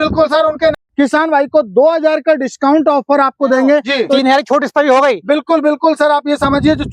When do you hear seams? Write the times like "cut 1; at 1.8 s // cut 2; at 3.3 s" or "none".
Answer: cut 1; at 0.7 s // cut 2; at 4.2 s